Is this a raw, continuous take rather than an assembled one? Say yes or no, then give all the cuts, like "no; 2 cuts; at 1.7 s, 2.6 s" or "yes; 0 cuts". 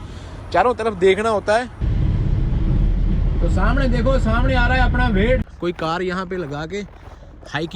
no; 2 cuts; at 1.8 s, 5.5 s